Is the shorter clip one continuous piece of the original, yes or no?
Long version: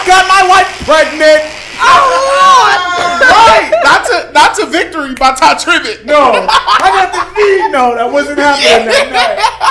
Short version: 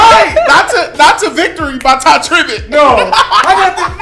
yes